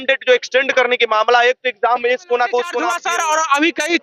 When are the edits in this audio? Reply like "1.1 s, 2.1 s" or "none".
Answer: 3.0 s